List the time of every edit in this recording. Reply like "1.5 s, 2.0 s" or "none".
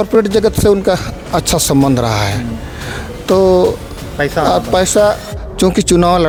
none